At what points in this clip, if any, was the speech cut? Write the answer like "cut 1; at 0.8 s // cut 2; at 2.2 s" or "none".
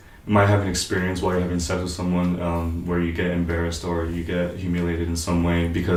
none